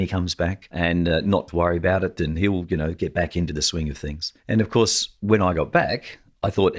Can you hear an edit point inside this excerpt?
no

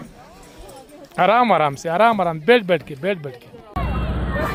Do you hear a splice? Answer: no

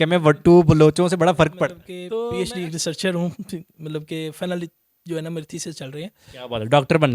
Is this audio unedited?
no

